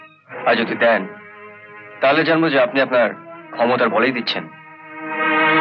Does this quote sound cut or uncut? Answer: uncut